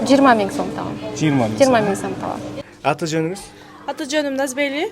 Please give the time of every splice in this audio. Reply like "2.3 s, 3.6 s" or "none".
2.6 s